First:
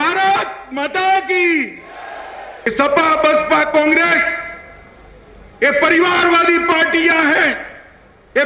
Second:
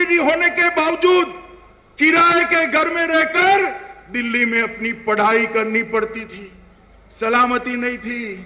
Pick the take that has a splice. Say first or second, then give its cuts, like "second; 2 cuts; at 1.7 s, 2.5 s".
first; 1 cut; at 2.7 s